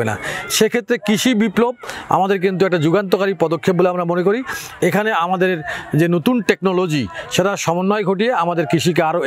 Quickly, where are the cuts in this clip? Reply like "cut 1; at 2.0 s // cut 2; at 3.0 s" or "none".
none